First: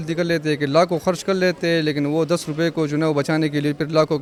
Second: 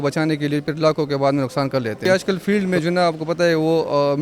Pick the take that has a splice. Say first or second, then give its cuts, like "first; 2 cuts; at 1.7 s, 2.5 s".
second; 1 cut; at 2.0 s